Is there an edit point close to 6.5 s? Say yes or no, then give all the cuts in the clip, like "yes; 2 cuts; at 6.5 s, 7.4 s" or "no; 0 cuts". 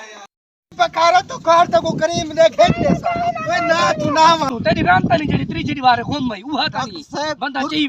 no; 1 cut; at 4.5 s